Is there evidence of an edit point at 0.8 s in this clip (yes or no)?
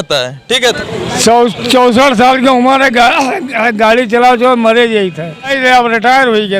yes